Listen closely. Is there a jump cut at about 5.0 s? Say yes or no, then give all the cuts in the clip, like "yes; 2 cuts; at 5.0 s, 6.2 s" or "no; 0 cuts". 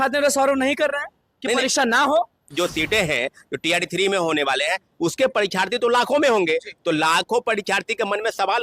no; 1 cut; at 2.5 s